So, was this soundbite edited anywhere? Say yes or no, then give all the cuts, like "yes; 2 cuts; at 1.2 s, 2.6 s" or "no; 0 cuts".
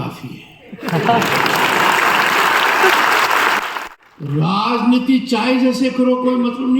yes; 1 cut; at 3.9 s